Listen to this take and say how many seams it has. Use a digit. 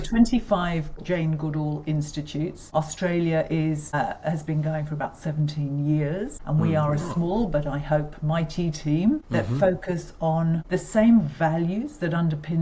6